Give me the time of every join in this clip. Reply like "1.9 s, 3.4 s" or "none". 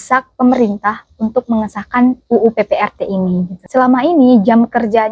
3.6 s